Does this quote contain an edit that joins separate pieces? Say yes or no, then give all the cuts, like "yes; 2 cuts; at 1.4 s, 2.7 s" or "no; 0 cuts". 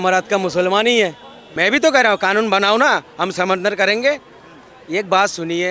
yes; 1 cut; at 1.4 s